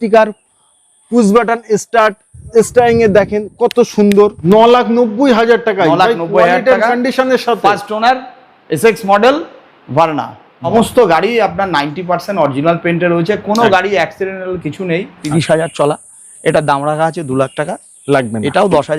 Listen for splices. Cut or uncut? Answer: cut